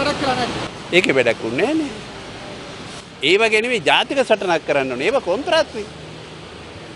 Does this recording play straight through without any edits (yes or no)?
yes